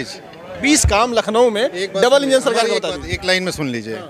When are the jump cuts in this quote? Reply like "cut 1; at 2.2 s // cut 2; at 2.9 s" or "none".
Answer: none